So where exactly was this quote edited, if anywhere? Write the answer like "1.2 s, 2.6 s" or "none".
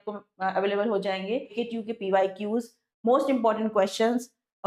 1.6 s